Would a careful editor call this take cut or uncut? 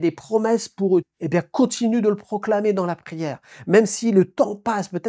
cut